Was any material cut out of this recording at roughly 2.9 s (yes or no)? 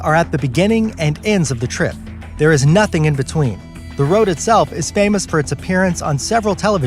yes